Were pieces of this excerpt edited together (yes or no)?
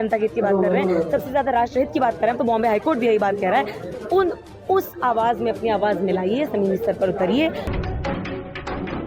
yes